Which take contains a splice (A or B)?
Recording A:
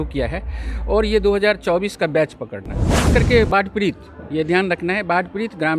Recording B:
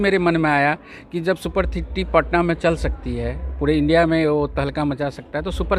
A